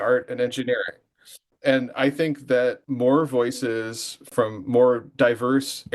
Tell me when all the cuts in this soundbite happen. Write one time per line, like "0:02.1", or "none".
0:01.0
0:02.8
0:04.2

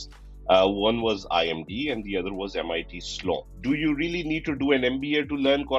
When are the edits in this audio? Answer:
0:03.5

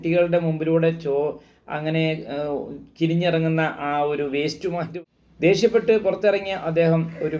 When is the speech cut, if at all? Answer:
0:04.9

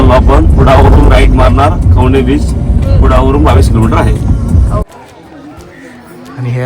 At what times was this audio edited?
0:04.8

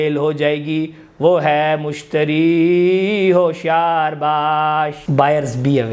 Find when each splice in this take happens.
0:05.0

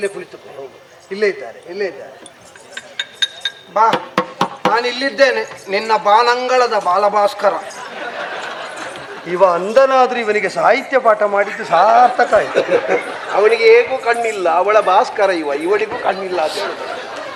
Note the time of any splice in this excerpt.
none

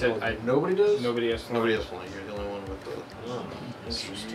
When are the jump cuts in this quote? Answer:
none

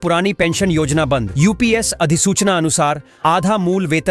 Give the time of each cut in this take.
none

